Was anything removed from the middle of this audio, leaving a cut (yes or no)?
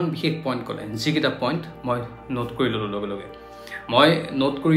no